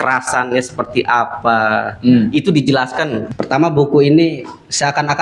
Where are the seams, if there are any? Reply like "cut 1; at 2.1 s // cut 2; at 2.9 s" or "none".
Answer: cut 1; at 3.2 s